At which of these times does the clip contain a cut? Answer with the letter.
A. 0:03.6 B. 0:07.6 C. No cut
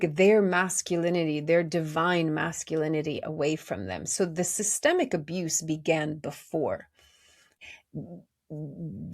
C